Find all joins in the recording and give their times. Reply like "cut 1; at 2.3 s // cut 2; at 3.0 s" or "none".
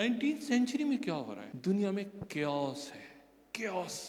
cut 1; at 1.4 s